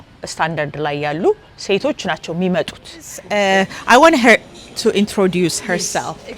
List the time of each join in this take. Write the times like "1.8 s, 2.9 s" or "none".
3.3 s